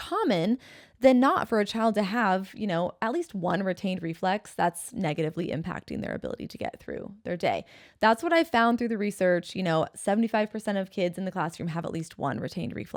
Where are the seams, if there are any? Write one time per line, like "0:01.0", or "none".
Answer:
none